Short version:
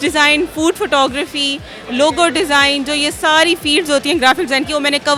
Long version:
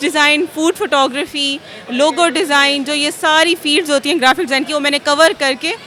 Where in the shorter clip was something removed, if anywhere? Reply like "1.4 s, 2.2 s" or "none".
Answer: none